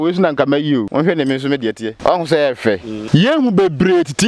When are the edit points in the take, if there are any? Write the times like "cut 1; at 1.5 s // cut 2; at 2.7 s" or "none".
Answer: cut 1; at 0.9 s // cut 2; at 1.9 s // cut 3; at 2.9 s